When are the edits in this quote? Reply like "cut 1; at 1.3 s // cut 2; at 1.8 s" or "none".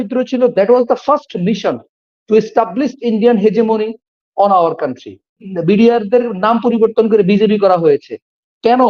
cut 1; at 5.5 s